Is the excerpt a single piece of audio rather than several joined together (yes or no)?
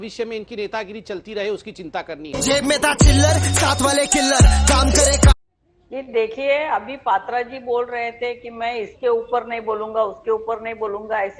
yes